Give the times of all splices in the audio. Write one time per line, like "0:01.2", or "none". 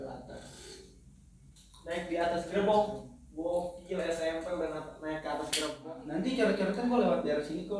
0:05.8